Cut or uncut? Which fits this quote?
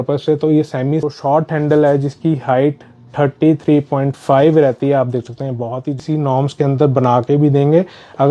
cut